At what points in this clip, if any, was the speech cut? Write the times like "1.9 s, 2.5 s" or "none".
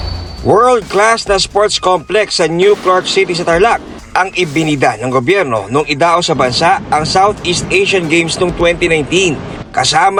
none